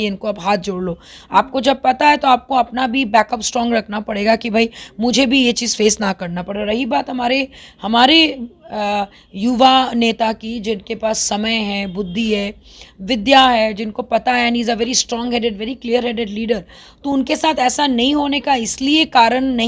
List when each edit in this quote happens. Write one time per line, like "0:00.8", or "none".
none

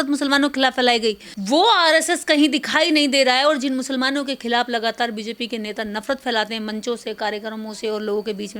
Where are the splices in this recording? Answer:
0:01.3

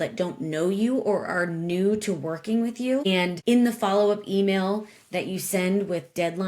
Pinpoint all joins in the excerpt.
0:03.2

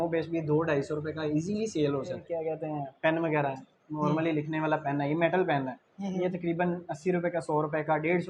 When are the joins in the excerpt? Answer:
0:02.3

